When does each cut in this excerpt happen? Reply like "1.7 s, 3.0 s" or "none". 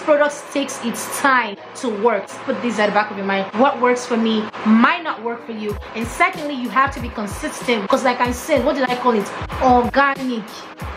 2.3 s, 7.9 s